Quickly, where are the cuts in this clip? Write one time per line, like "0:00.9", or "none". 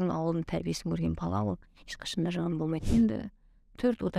0:02.8